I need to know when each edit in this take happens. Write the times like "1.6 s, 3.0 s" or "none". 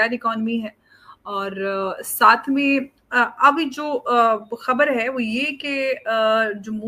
none